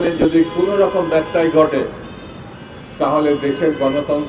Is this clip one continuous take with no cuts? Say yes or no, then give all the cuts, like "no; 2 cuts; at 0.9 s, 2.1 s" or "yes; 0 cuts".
yes; 0 cuts